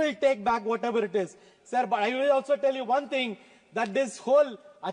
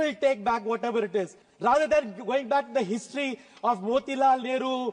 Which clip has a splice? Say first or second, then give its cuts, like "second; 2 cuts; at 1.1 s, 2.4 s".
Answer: second; 1 cut; at 1.4 s